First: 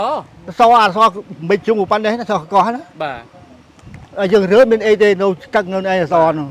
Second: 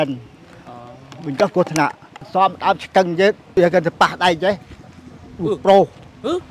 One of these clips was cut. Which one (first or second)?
second